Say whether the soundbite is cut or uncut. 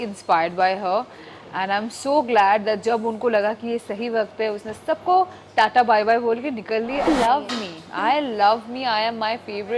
cut